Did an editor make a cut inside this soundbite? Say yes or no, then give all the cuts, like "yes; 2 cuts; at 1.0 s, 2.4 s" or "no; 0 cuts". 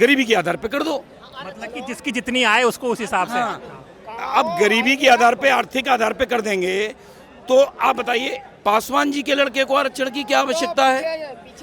no; 0 cuts